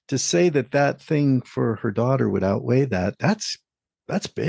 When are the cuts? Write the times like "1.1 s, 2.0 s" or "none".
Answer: none